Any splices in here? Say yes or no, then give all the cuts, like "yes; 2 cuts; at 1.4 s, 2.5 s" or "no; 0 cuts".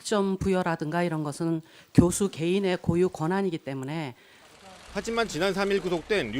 yes; 1 cut; at 4.2 s